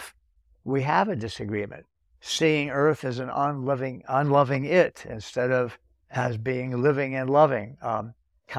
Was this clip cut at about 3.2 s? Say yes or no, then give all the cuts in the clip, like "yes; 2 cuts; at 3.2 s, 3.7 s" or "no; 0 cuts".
no; 0 cuts